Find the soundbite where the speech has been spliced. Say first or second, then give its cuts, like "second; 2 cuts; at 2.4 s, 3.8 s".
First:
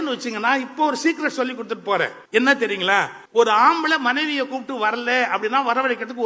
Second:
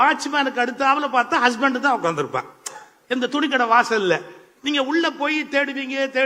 first; 2 cuts; at 2.2 s, 3.2 s